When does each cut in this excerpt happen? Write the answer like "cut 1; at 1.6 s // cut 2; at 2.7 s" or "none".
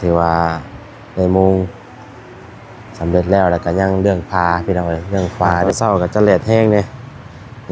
cut 1; at 5.6 s